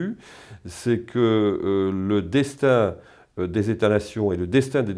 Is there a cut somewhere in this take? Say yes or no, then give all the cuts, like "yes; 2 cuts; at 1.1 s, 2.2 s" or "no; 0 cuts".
no; 0 cuts